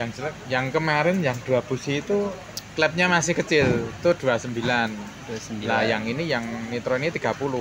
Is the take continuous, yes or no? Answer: yes